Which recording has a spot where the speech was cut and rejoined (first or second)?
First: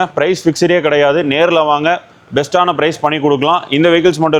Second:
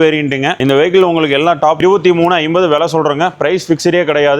second